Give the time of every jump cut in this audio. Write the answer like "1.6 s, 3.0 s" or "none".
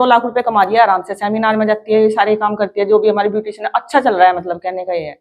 none